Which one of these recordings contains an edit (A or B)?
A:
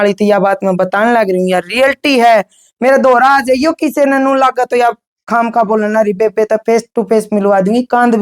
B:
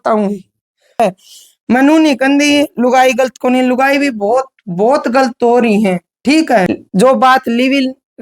B